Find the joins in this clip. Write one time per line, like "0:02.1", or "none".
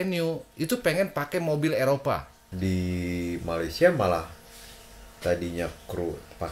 0:02.4